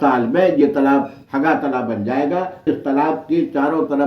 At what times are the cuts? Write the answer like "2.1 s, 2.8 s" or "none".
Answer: 2.7 s

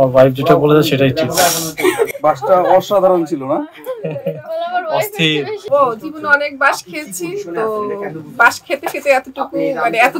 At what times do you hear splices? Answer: none

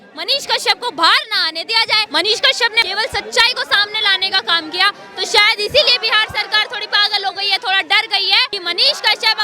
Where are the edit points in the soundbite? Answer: 2.0 s, 2.8 s, 8.5 s

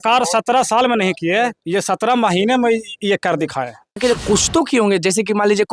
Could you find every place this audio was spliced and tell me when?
4.0 s

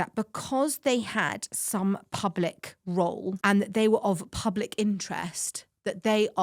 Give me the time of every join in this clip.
3.4 s

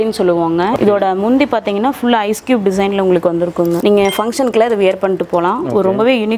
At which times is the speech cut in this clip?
0.8 s, 3.8 s

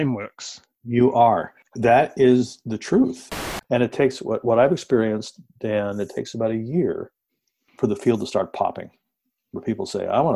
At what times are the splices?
1.6 s, 3.4 s

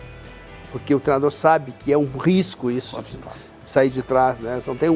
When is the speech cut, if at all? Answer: none

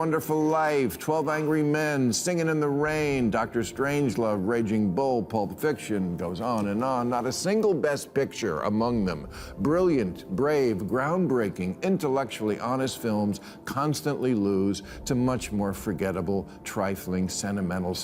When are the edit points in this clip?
none

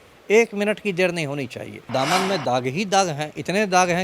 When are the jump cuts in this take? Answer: 1.9 s

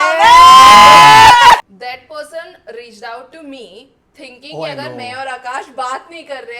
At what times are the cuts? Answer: 1.6 s

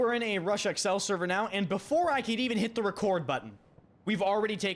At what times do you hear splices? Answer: none

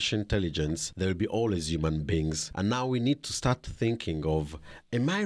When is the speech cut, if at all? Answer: 0.9 s, 2.4 s

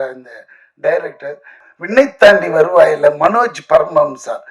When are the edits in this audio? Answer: 1.6 s

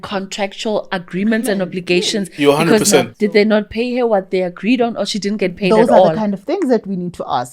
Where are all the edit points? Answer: 3.1 s

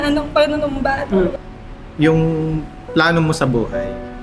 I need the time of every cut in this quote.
1.4 s

